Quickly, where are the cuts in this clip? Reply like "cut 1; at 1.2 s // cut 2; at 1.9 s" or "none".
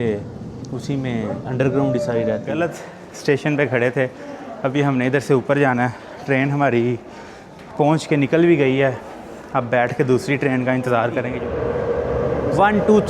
cut 1; at 2.6 s // cut 2; at 11.3 s